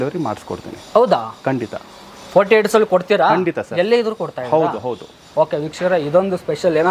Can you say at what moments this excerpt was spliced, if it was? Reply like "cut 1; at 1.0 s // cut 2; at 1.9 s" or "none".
none

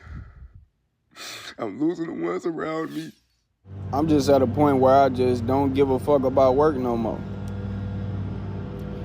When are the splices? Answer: cut 1; at 3.8 s

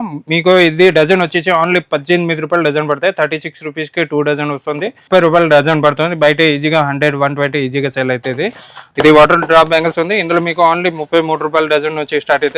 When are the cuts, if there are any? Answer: cut 1; at 5.0 s // cut 2; at 8.8 s

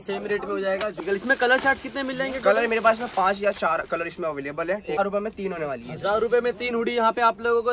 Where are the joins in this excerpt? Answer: cut 1; at 1.0 s // cut 2; at 5.0 s

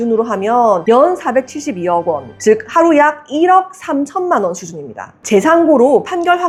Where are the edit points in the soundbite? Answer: none

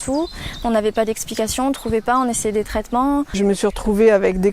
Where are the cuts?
cut 1; at 3.3 s

